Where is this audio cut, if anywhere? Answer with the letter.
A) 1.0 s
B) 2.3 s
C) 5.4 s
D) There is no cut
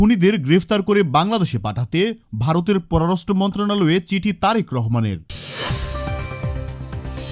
C